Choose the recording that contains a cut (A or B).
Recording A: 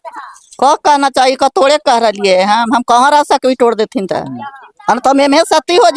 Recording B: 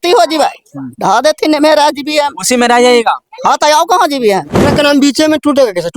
B